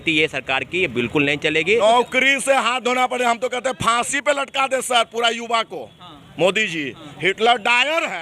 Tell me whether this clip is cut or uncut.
cut